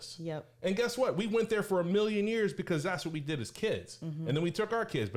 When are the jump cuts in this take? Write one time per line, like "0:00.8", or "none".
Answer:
none